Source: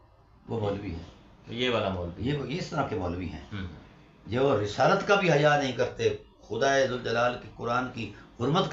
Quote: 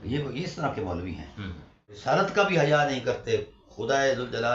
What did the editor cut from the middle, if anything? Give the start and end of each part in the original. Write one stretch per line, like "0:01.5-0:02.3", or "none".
0:04.1-0:04.7